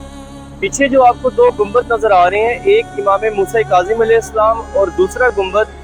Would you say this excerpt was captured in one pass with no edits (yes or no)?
yes